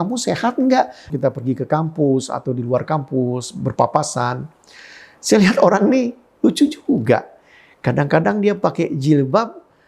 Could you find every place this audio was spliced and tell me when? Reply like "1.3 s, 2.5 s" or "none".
1.0 s